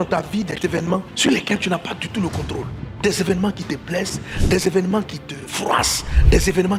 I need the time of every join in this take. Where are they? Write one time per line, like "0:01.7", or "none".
none